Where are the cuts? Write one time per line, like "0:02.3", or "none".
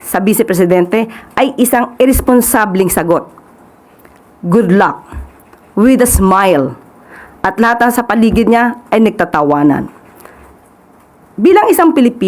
none